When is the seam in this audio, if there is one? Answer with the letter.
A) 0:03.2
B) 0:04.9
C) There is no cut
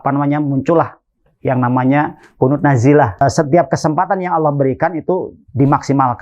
A